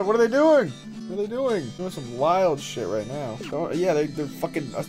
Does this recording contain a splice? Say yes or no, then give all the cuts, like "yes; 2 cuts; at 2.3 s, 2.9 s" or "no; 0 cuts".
yes; 3 cuts; at 0.9 s, 1.7 s, 3.4 s